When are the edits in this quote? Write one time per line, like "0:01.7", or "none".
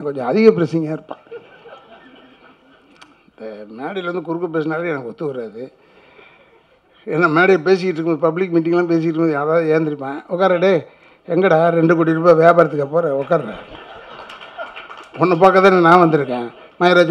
none